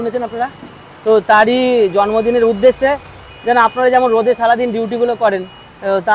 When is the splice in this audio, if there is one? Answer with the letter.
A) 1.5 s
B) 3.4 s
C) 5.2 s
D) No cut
D